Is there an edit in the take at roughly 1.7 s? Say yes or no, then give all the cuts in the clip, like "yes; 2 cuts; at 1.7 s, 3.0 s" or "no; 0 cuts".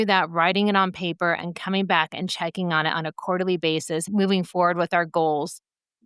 no; 1 cut; at 4.1 s